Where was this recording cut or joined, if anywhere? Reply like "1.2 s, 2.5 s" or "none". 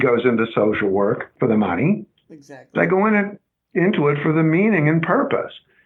1.3 s